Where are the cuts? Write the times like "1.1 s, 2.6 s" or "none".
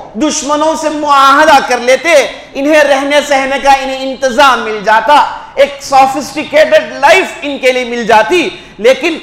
none